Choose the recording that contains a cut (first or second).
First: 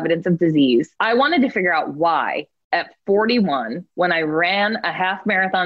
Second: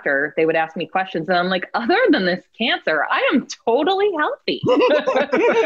first